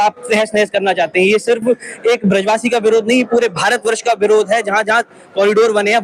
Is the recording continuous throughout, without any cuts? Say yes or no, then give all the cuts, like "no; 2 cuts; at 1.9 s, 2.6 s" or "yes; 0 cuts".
yes; 0 cuts